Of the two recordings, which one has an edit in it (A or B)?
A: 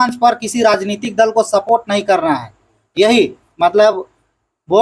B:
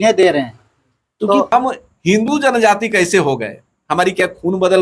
B